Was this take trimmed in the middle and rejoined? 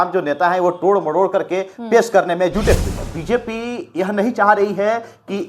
yes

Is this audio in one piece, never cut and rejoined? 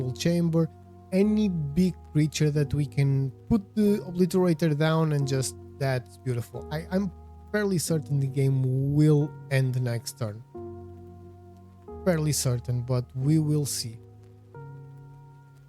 yes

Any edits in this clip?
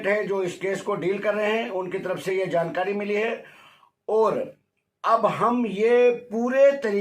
no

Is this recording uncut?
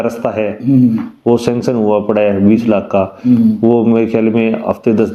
yes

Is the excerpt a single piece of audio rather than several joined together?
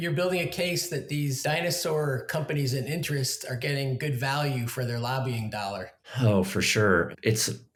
yes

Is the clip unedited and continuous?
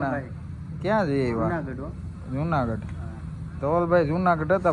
yes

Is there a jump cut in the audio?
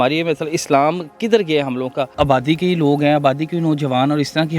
yes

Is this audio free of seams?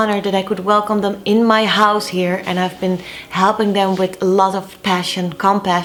yes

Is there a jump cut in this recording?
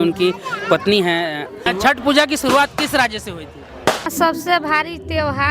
yes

